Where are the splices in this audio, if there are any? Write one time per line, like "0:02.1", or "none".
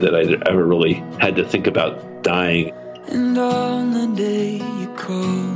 0:01.1
0:02.7